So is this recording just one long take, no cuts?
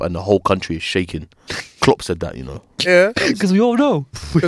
yes; 0 cuts

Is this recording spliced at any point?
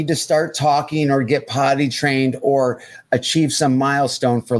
no; 0 cuts

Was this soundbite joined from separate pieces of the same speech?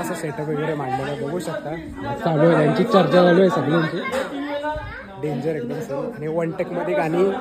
no; 0 cuts

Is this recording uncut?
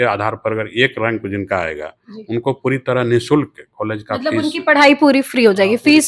yes; 0 cuts

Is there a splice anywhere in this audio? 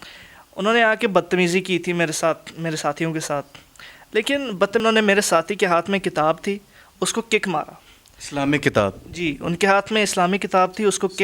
yes; 1 cut; at 4.8 s

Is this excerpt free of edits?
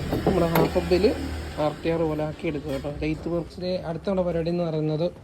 no; 1 cut; at 3.5 s

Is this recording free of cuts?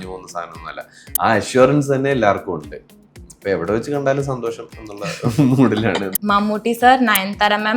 no; 1 cut; at 6.1 s

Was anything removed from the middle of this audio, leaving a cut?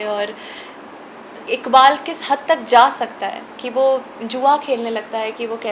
no; 0 cuts

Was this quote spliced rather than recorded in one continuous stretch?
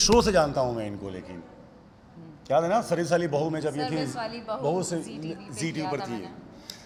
no; 0 cuts

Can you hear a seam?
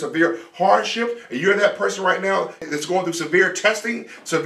yes; 1 cut; at 2.6 s

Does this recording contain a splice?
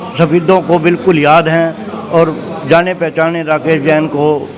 no; 0 cuts

